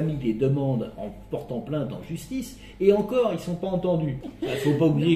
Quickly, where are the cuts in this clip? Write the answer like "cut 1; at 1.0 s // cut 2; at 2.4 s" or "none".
cut 1; at 4.2 s